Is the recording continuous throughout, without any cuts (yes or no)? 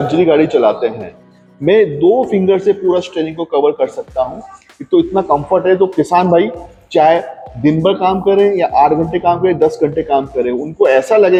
yes